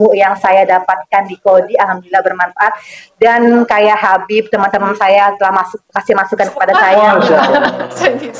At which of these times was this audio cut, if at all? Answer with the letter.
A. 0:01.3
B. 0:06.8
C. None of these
B